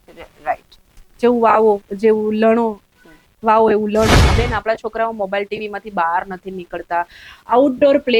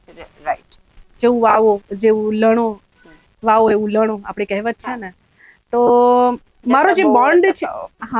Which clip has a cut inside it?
first; 1 cut; at 4.3 s

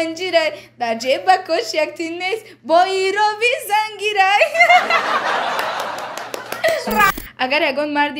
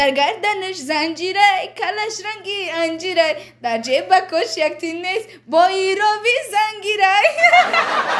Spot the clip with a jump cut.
first; 1 cut; at 7.1 s

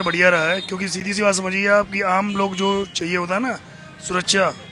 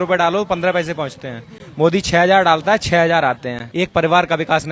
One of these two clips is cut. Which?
second; 1 cut; at 3.6 s

